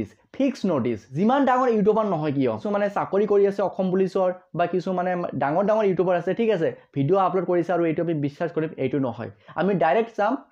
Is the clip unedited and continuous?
no; 2 cuts; at 1.1 s, 2.6 s

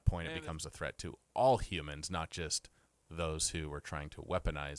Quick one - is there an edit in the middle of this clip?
no; 0 cuts

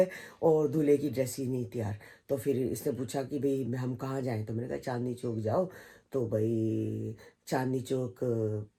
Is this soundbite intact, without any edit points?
yes; 0 cuts

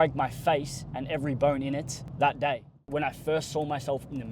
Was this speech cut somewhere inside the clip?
yes; 1 cut; at 2.8 s

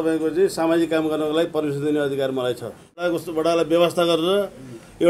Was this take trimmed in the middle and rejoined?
yes; 1 cut; at 3.0 s

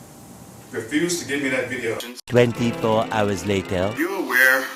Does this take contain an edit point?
yes; 1 cut; at 2.1 s

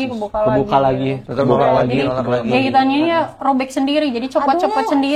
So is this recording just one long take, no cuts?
yes; 0 cuts

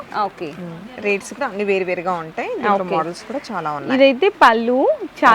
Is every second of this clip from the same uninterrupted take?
yes; 0 cuts

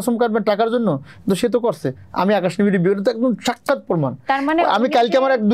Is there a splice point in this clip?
no; 0 cuts

